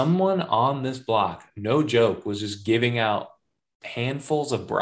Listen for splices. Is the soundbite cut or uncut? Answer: uncut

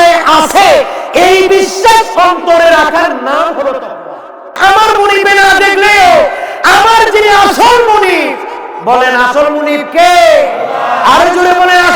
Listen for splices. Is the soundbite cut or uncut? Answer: cut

